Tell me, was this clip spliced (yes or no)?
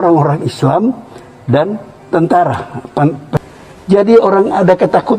yes